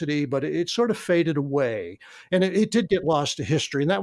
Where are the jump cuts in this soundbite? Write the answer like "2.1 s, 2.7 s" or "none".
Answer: none